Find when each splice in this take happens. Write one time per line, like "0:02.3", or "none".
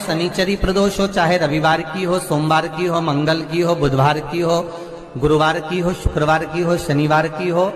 none